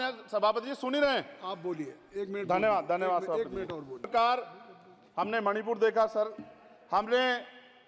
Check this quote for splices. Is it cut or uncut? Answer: cut